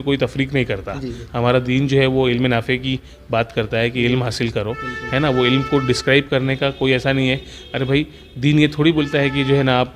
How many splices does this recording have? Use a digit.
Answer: 0